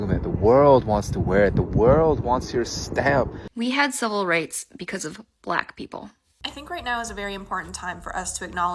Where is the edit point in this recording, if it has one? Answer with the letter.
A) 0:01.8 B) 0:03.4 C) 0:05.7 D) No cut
B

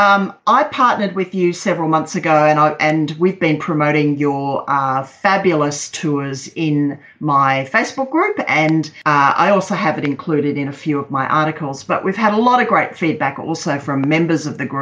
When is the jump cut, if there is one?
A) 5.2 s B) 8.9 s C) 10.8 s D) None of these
B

